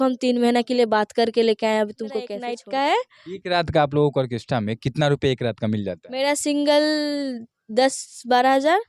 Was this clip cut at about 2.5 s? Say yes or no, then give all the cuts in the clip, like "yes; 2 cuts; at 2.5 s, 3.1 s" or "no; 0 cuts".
yes; 1 cut; at 2.5 s